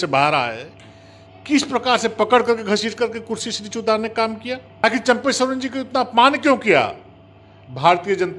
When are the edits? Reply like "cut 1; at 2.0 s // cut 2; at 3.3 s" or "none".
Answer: cut 1; at 4.8 s